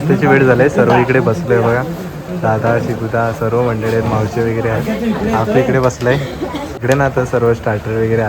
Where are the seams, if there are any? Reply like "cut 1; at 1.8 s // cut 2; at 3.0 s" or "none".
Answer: cut 1; at 6.7 s